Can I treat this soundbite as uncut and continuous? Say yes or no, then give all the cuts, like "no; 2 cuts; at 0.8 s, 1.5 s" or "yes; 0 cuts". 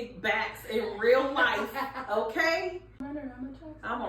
no; 1 cut; at 3.0 s